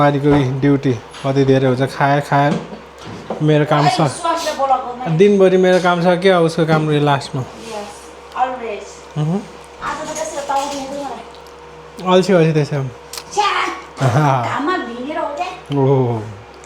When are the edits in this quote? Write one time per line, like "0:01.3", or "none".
none